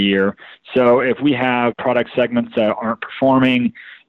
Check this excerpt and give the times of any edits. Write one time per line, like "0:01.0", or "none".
0:01.7